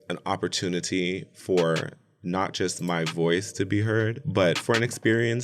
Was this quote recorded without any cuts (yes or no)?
yes